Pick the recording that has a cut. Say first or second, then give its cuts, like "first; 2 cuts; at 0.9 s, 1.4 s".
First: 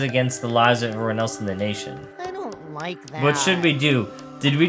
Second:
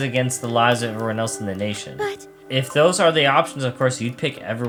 first; 1 cut; at 2.0 s